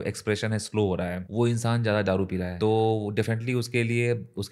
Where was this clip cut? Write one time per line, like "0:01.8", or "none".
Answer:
0:01.2
0:02.5